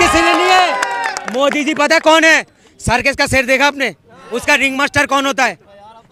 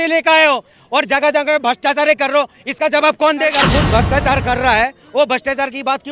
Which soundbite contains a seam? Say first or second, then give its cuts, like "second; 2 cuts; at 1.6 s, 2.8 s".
second; 1 cut; at 3.6 s